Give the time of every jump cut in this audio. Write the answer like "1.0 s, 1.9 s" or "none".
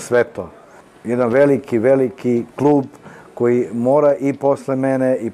none